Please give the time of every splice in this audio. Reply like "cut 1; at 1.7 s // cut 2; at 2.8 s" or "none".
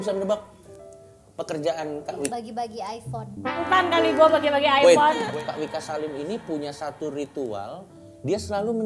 cut 1; at 2.3 s // cut 2; at 3.6 s // cut 3; at 5.2 s